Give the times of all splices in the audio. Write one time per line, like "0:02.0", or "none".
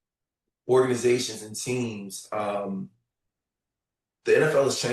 none